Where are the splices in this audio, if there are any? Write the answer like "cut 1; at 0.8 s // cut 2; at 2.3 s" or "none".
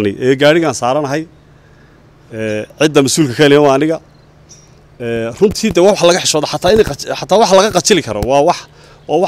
none